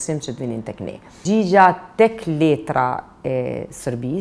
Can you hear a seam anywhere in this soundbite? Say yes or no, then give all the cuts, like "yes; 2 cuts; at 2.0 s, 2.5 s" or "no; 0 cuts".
yes; 1 cut; at 1.2 s